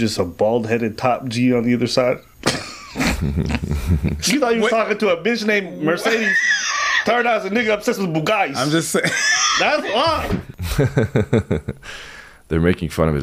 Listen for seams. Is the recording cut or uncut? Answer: cut